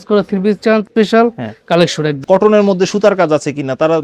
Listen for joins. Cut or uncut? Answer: cut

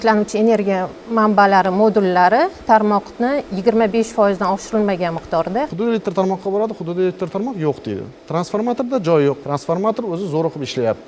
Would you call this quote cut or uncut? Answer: cut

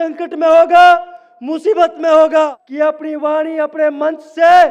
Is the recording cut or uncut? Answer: cut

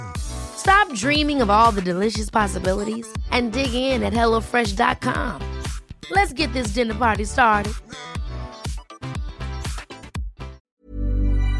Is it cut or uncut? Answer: cut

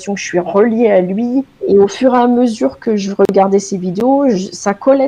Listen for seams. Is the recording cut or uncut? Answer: cut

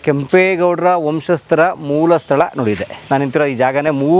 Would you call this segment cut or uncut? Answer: cut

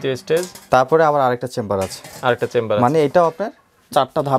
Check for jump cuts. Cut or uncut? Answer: uncut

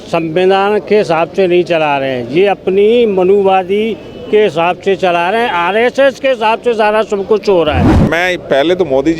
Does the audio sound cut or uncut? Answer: cut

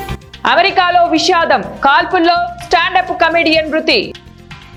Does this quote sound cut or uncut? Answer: uncut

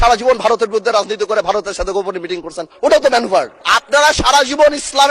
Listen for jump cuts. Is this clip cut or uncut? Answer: cut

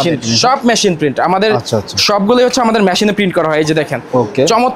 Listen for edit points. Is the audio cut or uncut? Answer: uncut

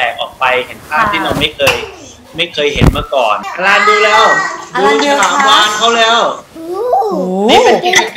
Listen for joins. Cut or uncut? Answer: cut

